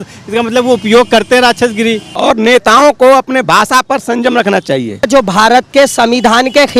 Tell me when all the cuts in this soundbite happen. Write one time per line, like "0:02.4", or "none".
0:02.1
0:05.1